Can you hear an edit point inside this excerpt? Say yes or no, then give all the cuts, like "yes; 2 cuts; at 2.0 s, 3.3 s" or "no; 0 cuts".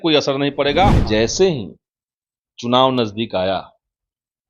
yes; 1 cut; at 1.0 s